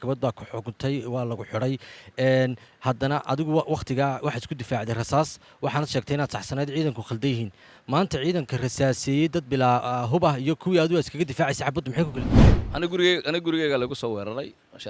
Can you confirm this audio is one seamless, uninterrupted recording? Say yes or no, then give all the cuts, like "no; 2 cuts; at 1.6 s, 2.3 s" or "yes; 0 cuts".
yes; 0 cuts